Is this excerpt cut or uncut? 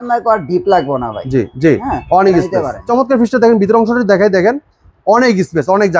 cut